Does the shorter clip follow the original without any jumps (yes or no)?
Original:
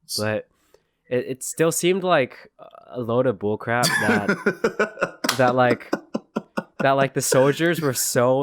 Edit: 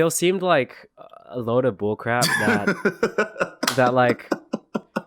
yes